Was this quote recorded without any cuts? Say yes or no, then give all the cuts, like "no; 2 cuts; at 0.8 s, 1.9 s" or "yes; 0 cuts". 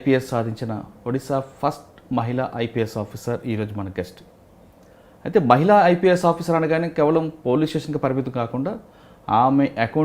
yes; 0 cuts